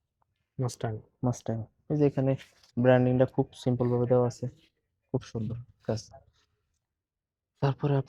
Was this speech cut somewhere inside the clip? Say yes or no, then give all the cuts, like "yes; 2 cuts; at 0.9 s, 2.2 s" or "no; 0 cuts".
no; 0 cuts